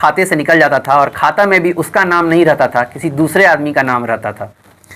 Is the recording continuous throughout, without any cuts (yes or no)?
yes